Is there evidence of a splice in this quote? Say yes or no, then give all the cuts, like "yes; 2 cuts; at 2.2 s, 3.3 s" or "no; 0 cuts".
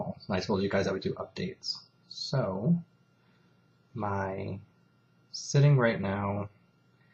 yes; 1 cut; at 2.5 s